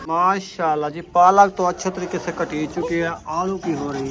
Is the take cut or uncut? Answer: uncut